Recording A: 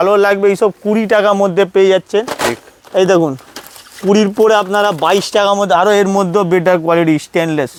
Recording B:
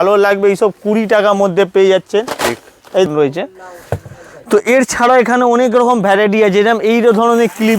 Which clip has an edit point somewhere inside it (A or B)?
B